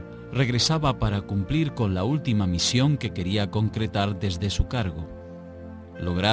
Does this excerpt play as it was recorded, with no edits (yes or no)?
yes